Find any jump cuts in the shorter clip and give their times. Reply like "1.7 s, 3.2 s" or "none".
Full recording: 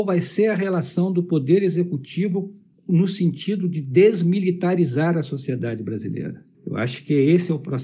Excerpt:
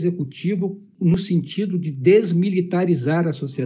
1.2 s